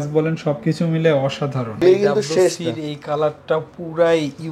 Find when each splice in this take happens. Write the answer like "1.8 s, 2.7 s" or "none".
1.8 s